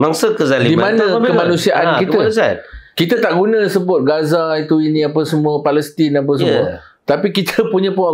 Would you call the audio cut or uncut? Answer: uncut